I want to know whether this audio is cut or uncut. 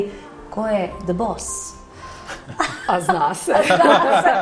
uncut